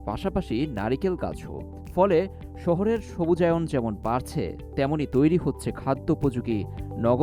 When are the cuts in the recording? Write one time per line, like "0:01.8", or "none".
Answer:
none